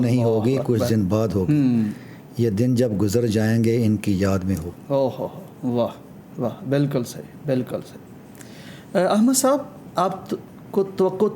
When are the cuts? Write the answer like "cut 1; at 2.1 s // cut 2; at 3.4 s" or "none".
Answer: none

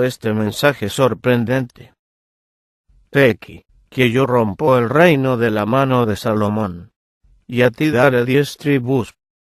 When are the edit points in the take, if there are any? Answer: cut 1; at 6.5 s

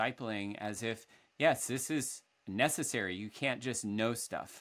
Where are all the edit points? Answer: none

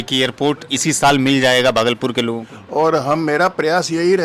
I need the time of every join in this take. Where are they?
cut 1; at 2.5 s

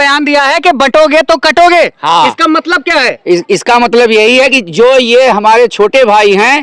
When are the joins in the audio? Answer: none

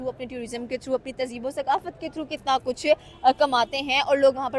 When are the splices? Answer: none

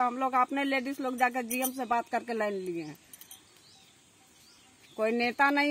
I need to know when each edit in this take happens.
none

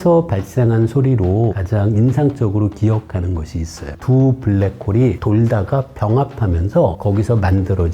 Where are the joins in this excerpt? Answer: cut 1; at 1.6 s // cut 2; at 4.0 s // cut 3; at 7.0 s

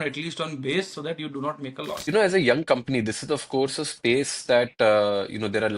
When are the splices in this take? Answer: cut 1; at 2.1 s

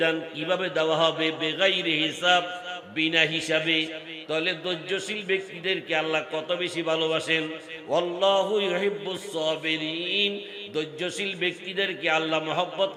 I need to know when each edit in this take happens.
none

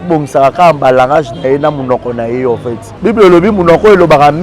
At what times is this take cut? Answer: cut 1; at 2.9 s

